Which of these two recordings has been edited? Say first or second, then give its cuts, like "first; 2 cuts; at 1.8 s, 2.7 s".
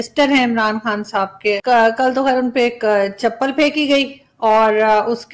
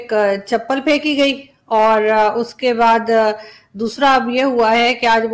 first; 1 cut; at 1.3 s